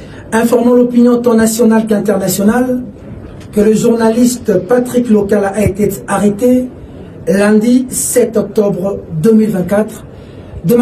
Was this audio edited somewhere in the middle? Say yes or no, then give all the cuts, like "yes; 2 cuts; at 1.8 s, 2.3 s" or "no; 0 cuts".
no; 0 cuts